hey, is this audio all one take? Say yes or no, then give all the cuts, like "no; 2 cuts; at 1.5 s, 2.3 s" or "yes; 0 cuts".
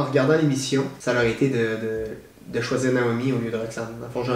no; 1 cut; at 1.0 s